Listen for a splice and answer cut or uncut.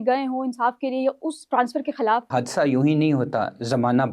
cut